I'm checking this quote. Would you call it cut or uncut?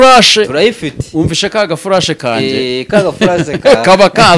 uncut